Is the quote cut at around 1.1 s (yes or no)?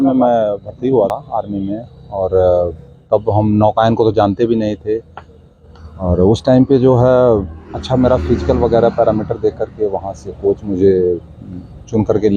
yes